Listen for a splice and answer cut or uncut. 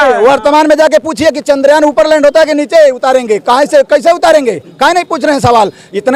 uncut